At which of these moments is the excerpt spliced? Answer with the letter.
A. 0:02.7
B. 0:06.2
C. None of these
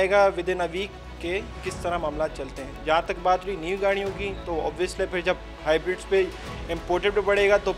C